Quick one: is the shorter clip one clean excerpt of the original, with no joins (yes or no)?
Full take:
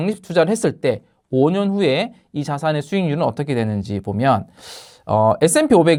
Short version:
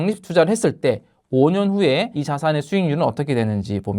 no